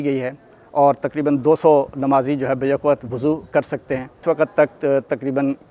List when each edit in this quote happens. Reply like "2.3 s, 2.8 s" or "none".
4.1 s